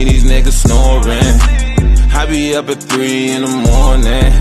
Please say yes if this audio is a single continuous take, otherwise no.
yes